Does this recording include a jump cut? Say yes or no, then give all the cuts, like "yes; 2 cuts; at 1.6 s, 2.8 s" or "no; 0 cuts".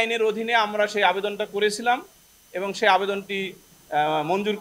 no; 0 cuts